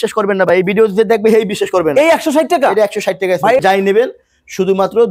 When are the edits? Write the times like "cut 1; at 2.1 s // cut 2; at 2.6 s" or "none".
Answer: cut 1; at 3.6 s